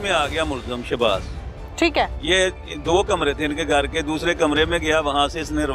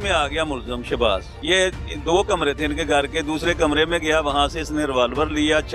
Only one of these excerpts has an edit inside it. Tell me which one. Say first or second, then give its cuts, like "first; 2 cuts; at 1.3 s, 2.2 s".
second; 1 cut; at 1.4 s